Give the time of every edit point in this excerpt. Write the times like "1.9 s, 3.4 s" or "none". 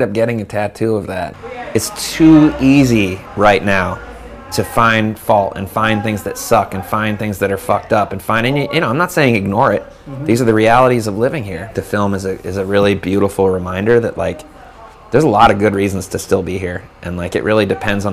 1.3 s, 11.7 s